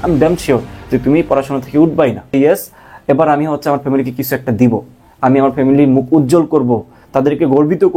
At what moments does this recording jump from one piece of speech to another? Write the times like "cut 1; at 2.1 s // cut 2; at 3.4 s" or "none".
cut 1; at 2.3 s